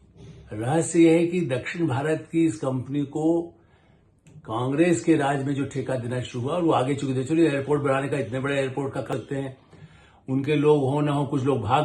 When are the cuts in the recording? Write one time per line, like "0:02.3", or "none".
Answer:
0:09.1